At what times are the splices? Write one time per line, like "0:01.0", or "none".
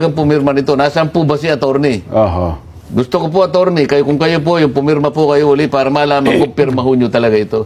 none